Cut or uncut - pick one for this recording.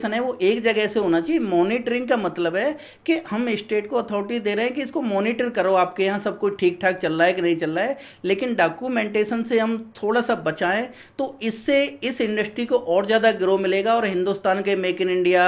uncut